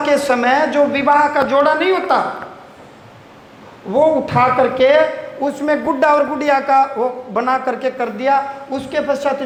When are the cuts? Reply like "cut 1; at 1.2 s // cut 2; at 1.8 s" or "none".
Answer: none